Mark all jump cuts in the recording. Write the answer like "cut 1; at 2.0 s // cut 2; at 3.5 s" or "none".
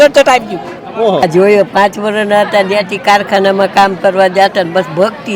cut 1; at 1.2 s